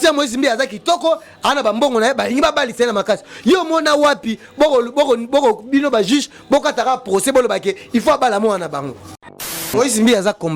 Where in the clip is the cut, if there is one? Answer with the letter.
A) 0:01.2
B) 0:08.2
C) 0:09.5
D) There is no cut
C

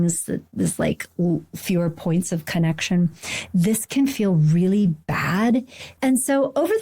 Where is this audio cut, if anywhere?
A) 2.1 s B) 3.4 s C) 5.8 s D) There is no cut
C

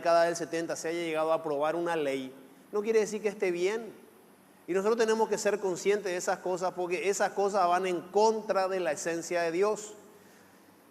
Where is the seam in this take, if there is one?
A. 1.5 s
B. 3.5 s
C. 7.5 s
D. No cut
B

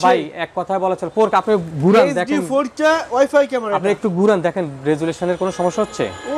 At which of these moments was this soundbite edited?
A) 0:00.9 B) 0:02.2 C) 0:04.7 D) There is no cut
D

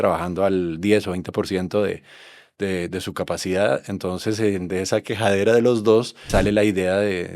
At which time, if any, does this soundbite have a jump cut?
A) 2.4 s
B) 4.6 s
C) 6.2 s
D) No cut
C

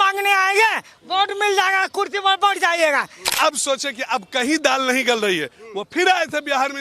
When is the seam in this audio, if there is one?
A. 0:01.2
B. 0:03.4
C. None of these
B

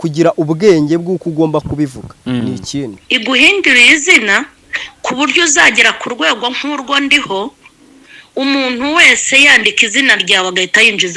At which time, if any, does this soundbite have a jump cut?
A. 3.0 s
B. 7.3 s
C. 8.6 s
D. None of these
A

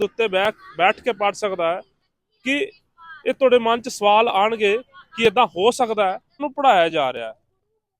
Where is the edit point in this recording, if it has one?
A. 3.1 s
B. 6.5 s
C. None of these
B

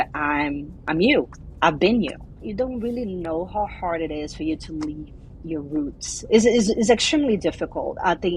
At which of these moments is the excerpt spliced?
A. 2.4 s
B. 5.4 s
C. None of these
A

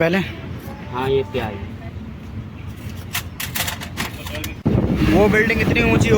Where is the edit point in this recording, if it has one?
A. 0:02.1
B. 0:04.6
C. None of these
B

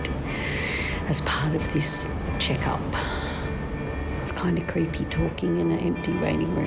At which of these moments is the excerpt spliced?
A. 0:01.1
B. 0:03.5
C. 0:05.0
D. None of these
B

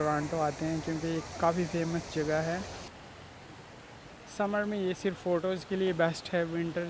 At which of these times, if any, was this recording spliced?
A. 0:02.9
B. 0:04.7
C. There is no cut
A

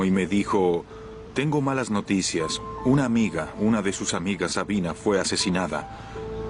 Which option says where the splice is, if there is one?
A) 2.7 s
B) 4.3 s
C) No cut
A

